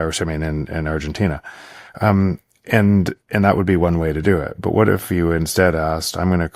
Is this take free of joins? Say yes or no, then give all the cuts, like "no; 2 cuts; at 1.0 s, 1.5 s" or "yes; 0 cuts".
yes; 0 cuts